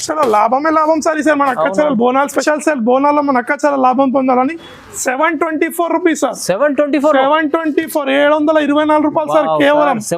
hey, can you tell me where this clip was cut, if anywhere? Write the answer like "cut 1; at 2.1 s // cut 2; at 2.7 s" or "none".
cut 1; at 2.4 s